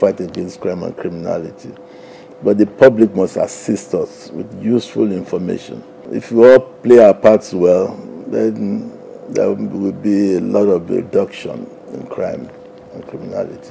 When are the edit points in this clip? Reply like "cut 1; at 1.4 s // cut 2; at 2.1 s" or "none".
cut 1; at 5.9 s